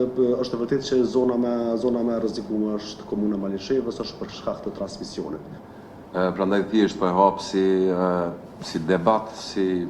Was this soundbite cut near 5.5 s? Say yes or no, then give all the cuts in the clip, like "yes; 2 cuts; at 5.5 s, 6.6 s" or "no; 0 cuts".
yes; 1 cut; at 5.5 s